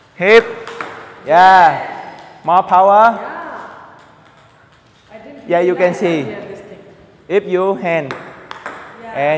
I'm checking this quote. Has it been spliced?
yes; 1 cut; at 1.4 s

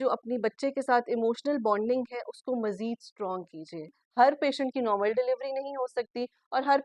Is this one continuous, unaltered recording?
no; 1 cut; at 4.0 s

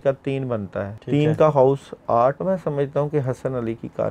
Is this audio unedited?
no; 2 cuts; at 1.0 s, 2.4 s

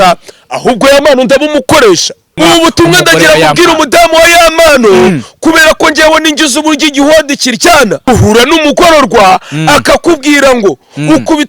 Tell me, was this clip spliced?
yes; 2 cuts; at 2.2 s, 8.1 s

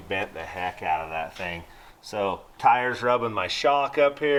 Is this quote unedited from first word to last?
yes; 0 cuts

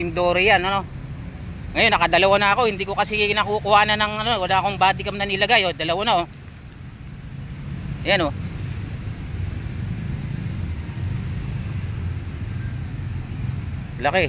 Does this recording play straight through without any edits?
yes; 0 cuts

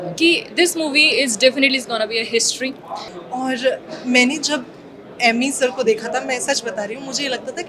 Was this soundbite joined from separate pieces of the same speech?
yes; 1 cut; at 3.1 s

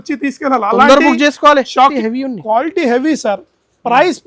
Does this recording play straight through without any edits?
no; 1 cut; at 2.0 s

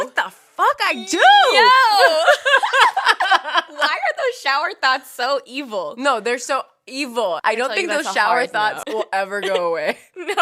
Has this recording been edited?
yes; 2 cuts; at 7.4 s, 8.8 s

